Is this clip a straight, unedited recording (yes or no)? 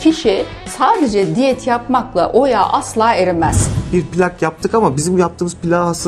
no